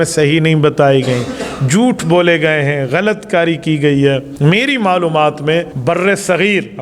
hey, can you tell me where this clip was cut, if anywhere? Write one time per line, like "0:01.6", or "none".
0:04.3
0:05.7